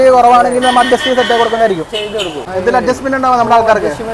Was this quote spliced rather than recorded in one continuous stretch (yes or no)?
yes